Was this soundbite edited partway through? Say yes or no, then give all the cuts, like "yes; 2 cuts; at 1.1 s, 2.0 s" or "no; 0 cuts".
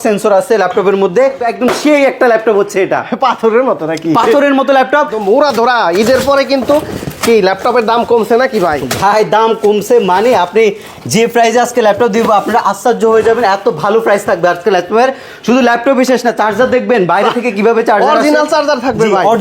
yes; 2 cuts; at 1.4 s, 5.2 s